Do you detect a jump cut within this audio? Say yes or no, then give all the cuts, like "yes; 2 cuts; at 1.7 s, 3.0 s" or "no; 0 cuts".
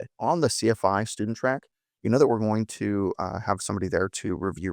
no; 0 cuts